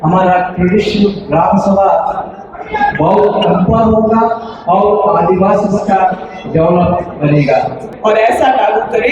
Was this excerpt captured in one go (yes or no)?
no